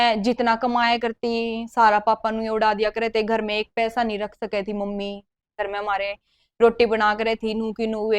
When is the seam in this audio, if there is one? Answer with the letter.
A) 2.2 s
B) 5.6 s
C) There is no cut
B